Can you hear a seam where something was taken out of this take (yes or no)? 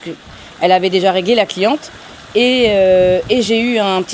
no